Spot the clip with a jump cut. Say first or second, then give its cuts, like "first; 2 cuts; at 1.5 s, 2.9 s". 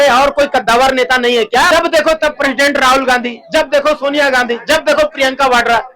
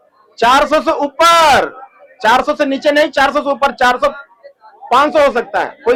first; 1 cut; at 1.7 s